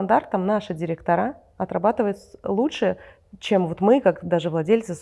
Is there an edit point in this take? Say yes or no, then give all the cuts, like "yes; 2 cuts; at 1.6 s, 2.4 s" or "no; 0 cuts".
no; 0 cuts